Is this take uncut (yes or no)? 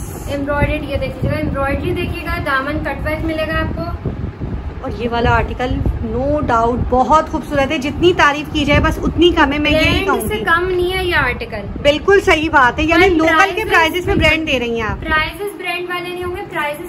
yes